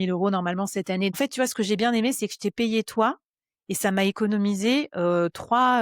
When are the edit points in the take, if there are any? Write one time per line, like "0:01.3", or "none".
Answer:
0:01.1